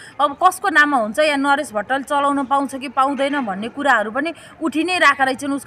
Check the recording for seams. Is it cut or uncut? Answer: uncut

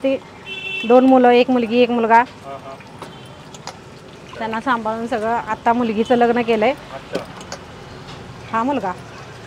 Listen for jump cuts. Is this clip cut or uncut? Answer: uncut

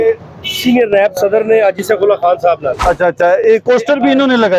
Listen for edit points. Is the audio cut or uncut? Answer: cut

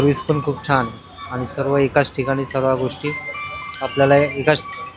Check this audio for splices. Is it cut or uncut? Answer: uncut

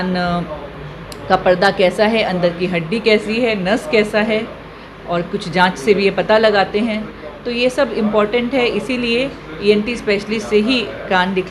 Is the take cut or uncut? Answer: uncut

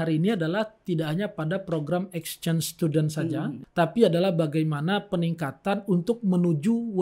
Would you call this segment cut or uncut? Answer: cut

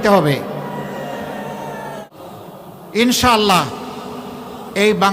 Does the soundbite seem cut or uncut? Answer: cut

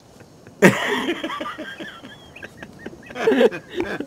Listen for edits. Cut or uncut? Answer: uncut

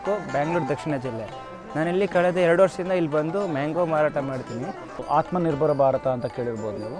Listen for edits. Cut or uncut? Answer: cut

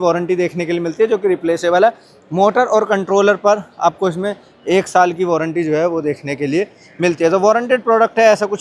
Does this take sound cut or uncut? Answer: uncut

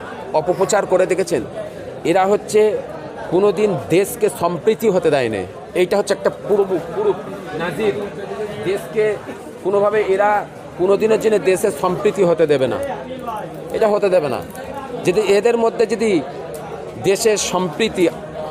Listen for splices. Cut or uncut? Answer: uncut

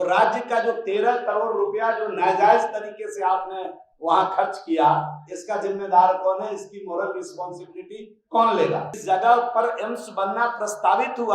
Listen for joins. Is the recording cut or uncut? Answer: cut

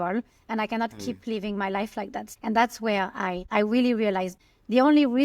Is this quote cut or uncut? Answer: cut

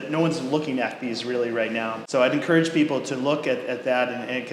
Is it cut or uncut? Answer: cut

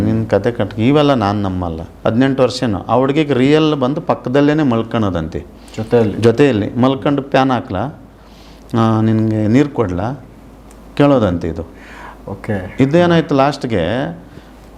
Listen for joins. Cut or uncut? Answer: cut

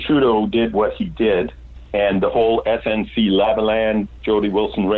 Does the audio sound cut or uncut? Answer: uncut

